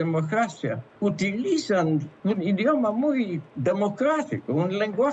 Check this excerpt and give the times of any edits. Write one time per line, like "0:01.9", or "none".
0:00.9
0:02.1
0:03.5